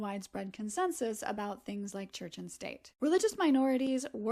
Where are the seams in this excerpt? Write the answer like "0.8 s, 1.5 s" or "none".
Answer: 2.8 s